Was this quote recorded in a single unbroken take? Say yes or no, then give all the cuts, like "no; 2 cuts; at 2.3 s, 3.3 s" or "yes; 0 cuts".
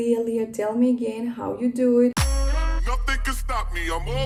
yes; 0 cuts